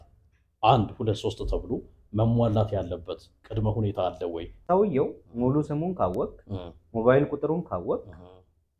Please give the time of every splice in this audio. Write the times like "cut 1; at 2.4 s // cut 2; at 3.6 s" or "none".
cut 1; at 4.5 s